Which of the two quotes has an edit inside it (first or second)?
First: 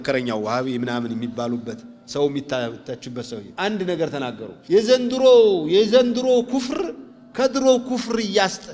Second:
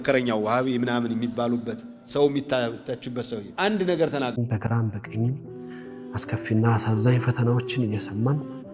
second